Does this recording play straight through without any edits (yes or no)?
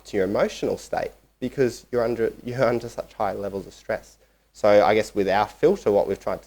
yes